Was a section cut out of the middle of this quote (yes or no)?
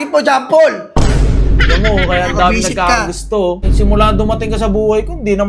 yes